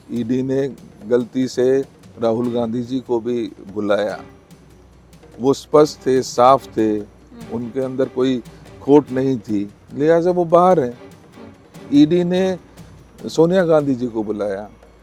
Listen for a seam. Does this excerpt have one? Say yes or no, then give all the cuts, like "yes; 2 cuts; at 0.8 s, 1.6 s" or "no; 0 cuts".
no; 0 cuts